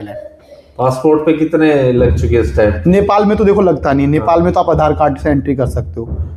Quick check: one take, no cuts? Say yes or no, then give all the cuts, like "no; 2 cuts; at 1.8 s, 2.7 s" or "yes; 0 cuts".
yes; 0 cuts